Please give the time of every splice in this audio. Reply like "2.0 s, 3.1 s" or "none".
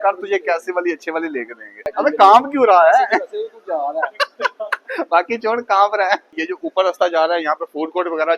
1.9 s, 6.3 s